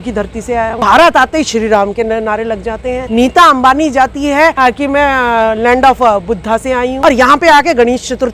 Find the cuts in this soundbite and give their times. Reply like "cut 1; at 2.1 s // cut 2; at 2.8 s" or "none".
cut 1; at 0.8 s // cut 2; at 3.0 s // cut 3; at 4.6 s // cut 4; at 6.9 s